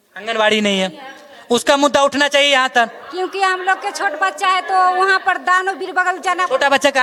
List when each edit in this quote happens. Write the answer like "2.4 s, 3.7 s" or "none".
none